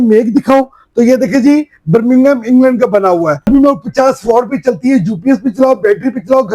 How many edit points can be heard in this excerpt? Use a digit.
1